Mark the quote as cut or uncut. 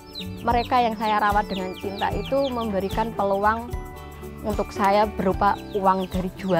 uncut